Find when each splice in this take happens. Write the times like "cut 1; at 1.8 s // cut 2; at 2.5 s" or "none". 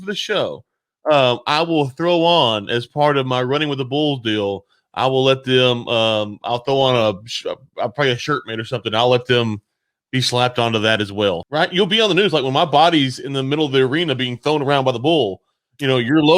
cut 1; at 11.4 s